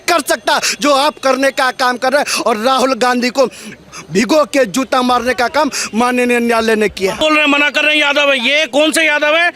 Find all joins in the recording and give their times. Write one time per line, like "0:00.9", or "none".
0:07.2

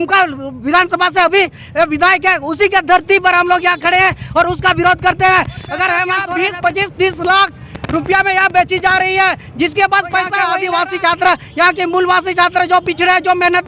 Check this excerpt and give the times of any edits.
0:06.1
0:10.4

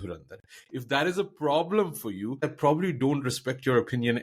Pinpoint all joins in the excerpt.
0:02.4

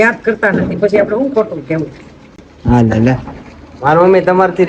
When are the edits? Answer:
none

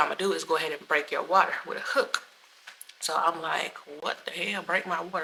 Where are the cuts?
none

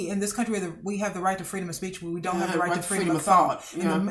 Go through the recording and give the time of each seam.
none

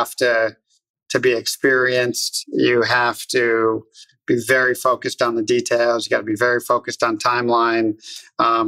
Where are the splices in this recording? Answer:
0:04.1

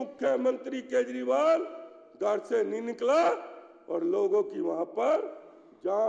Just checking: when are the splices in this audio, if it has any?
none

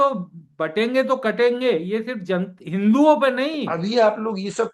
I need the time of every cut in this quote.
0:03.7

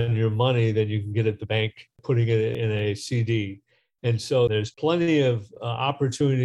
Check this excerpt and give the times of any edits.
0:02.6
0:04.6

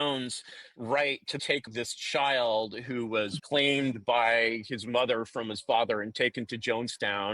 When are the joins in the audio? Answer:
0:01.6
0:03.4

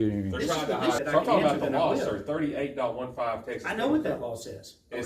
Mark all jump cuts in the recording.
0:01.0

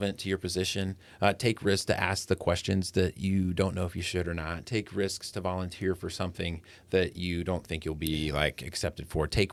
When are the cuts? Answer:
none

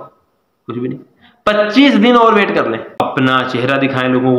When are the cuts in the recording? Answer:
0:03.0

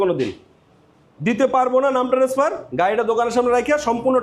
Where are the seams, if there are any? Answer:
none

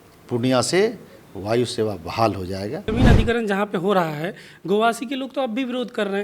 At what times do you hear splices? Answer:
0:02.8

